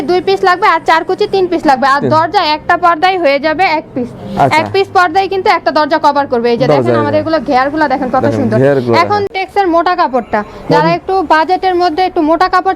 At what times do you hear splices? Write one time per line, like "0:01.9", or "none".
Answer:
none